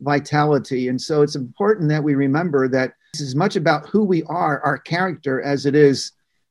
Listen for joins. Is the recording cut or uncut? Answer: cut